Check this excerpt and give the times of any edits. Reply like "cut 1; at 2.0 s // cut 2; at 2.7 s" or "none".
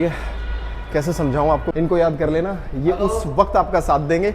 cut 1; at 1.7 s